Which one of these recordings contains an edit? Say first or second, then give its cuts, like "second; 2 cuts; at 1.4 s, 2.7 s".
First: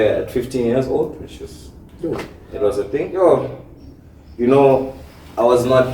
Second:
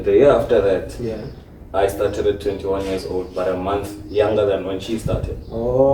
first; 1 cut; at 3.1 s